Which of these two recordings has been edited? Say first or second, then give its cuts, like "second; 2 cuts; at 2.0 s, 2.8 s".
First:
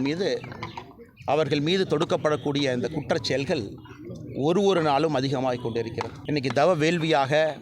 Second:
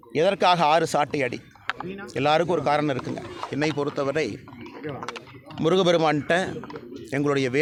first; 1 cut; at 6.1 s